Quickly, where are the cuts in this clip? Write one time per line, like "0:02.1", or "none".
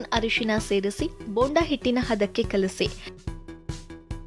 0:03.0